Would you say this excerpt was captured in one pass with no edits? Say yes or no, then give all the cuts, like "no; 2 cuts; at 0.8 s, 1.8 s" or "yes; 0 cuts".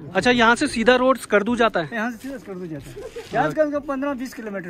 yes; 0 cuts